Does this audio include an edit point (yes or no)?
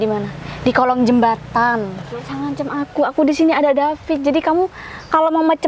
yes